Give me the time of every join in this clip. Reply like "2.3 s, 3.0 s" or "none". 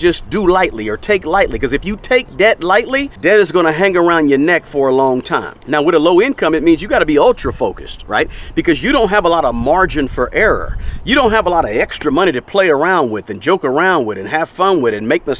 3.1 s, 5.5 s